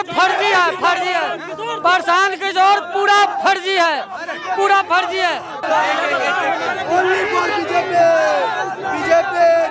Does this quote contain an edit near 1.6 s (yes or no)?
no